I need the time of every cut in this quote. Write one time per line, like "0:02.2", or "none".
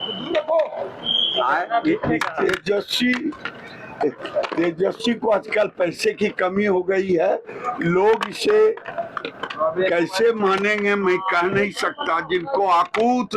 none